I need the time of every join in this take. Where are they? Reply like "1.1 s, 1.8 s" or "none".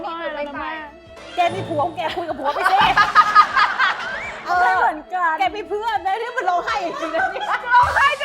4.1 s